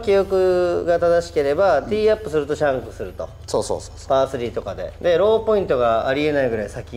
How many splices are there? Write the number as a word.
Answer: zero